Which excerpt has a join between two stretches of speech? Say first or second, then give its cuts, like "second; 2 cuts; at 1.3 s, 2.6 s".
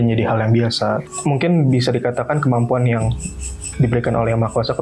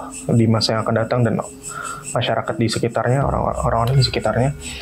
first; 1 cut; at 1.0 s